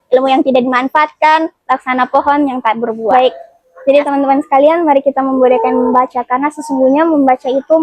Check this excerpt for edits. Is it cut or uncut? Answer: cut